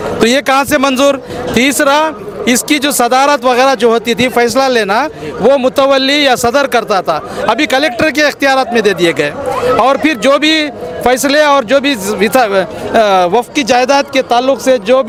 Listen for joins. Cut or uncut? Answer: uncut